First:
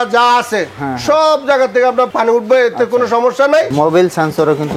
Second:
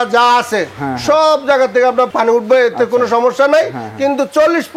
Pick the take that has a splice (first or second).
first